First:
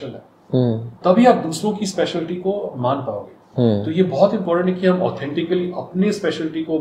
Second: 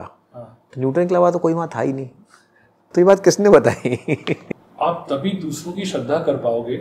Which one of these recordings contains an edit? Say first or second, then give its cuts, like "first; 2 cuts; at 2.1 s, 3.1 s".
second; 1 cut; at 4.6 s